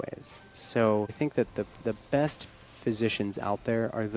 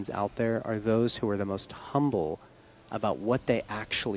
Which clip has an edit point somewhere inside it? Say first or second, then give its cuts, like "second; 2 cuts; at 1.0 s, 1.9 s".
first; 1 cut; at 1.1 s